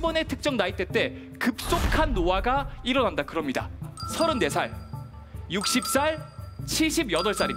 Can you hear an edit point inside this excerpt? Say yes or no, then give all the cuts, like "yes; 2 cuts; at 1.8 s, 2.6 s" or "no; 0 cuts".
yes; 1 cut; at 4.0 s